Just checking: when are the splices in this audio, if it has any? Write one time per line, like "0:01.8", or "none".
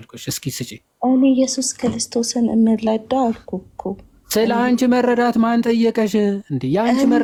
none